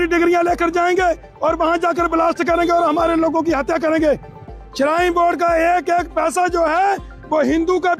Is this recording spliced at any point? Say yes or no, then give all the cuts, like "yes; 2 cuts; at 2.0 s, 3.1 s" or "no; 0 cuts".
yes; 1 cut; at 4.5 s